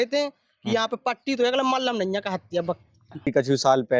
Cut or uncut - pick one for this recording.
cut